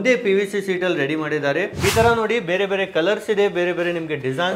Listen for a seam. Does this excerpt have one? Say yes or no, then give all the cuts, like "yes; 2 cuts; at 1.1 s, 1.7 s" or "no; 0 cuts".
yes; 1 cut; at 1.7 s